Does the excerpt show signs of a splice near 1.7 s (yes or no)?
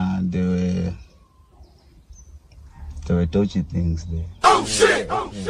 no